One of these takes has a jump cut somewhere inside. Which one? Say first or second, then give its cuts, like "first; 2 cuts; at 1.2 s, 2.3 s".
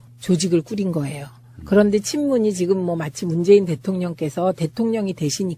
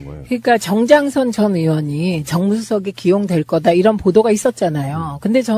second; 1 cut; at 3.8 s